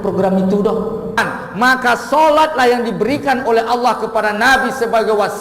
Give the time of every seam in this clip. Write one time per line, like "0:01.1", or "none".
0:01.2